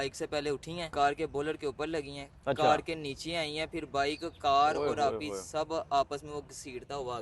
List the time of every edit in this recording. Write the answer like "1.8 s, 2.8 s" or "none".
0.9 s